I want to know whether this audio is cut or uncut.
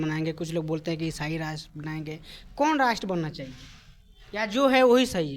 uncut